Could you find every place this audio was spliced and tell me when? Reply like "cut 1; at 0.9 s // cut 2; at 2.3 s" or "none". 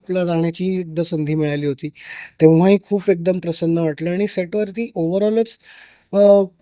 none